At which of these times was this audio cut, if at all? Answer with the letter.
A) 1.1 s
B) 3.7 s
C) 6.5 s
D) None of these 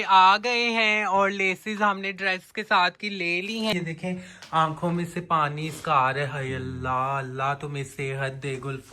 B